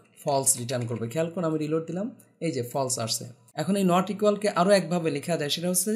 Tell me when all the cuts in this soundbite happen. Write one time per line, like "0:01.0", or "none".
0:03.6